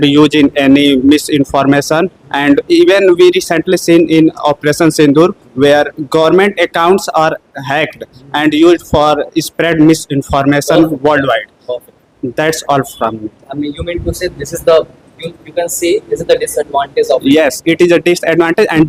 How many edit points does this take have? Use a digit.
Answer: 0